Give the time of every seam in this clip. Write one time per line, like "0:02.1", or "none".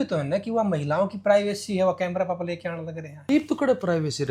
0:03.2